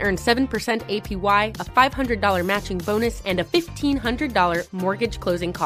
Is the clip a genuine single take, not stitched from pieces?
yes; 0 cuts

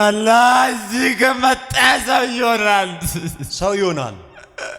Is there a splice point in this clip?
no; 0 cuts

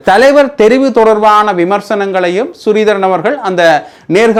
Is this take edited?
no; 0 cuts

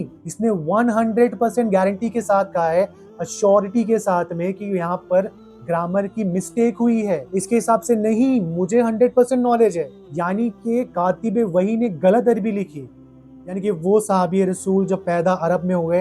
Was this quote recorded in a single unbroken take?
yes; 0 cuts

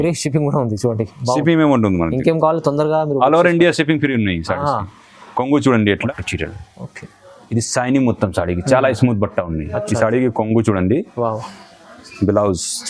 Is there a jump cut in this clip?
yes; 1 cut; at 6.1 s

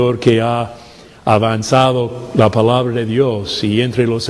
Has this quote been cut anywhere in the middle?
yes; 1 cut; at 2.5 s

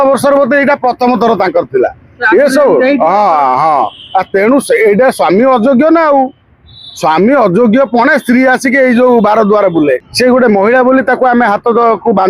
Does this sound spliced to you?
yes; 1 cut; at 10.1 s

